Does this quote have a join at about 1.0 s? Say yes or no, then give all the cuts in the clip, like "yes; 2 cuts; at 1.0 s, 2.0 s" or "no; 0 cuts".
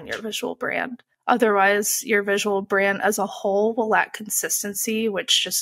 yes; 1 cut; at 1.0 s